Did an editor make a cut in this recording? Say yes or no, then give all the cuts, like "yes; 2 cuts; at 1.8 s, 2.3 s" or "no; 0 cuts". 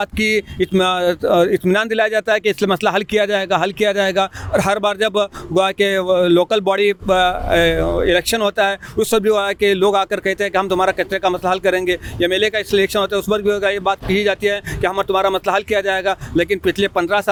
no; 0 cuts